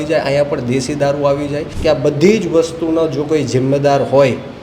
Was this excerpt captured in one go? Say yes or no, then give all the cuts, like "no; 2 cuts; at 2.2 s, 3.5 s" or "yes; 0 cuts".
no; 1 cut; at 1.7 s